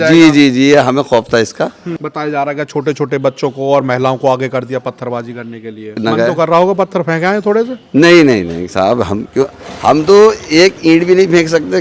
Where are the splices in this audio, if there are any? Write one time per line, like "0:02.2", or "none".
0:01.9
0:06.0